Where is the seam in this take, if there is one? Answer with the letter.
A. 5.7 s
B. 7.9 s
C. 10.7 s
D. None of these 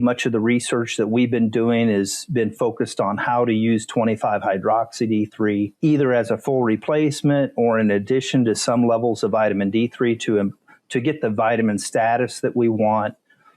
A